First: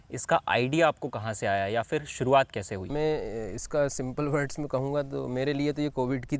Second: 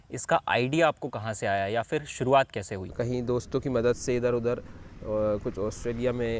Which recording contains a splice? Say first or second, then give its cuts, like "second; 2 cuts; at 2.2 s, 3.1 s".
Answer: second; 1 cut; at 2.8 s